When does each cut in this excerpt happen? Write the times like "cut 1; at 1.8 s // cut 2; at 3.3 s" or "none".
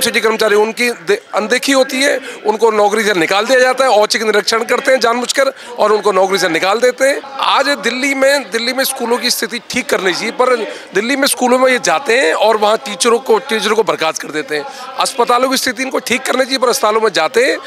cut 1; at 7.3 s

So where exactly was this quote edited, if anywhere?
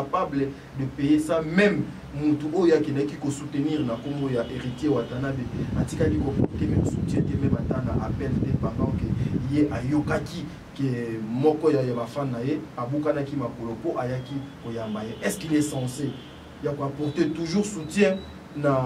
none

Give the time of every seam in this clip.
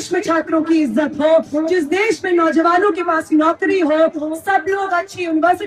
none

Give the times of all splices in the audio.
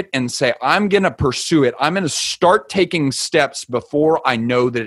none

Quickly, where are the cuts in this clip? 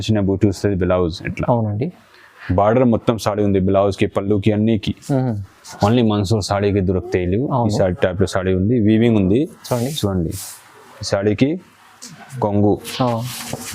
cut 1; at 5.6 s

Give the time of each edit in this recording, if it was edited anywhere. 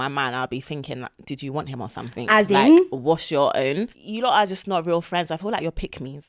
cut 1; at 3.9 s

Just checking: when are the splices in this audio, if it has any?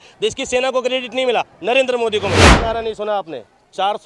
cut 1; at 2.5 s

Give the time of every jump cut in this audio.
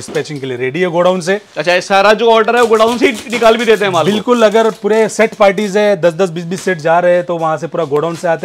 none

